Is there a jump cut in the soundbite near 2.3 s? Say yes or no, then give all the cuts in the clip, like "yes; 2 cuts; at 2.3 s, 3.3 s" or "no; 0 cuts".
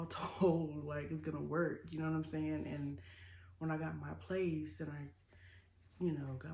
no; 0 cuts